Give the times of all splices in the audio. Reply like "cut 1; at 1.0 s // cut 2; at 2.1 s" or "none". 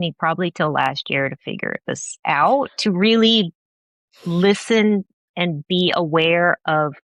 none